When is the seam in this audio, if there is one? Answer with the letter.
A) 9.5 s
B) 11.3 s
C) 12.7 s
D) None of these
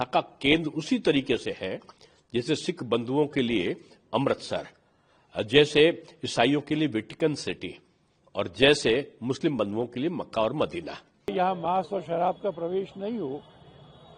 B